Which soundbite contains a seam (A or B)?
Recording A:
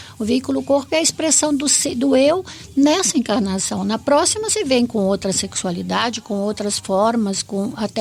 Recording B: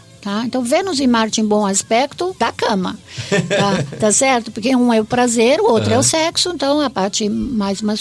B